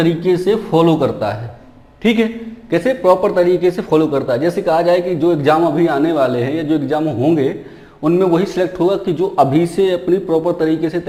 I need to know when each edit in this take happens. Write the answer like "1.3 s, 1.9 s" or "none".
none